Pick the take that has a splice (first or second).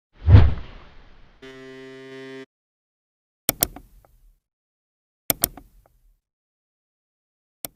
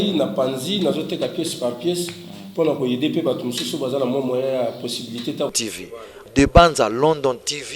second